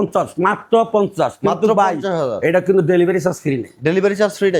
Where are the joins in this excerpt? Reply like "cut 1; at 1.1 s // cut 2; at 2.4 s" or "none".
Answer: none